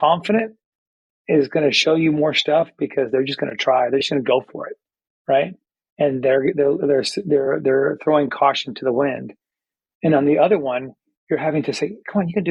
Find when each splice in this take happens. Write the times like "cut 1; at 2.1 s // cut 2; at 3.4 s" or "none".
none